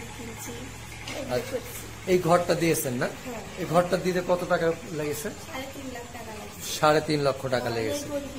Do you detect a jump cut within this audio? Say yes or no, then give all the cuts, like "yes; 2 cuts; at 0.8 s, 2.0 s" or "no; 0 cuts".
no; 0 cuts